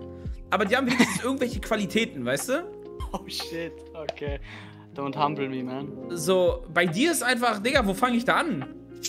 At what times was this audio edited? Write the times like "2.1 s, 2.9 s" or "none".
none